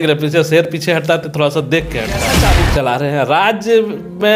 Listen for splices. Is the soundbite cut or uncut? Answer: cut